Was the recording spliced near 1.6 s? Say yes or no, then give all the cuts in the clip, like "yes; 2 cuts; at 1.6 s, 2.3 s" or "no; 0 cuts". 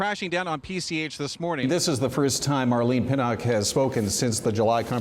yes; 1 cut; at 1.6 s